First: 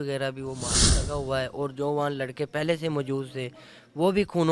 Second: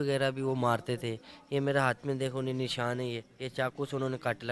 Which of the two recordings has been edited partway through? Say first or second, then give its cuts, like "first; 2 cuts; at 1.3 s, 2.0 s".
first; 1 cut; at 1.1 s